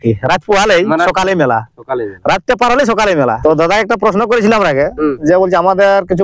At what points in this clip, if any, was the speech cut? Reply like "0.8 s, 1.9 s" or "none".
3.4 s